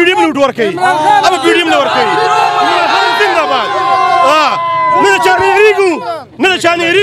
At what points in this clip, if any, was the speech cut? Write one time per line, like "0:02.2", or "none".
none